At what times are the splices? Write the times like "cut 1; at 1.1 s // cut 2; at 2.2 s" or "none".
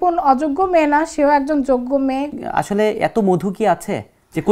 cut 1; at 2.3 s